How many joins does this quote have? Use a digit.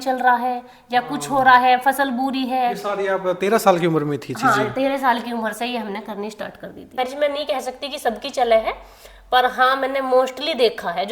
1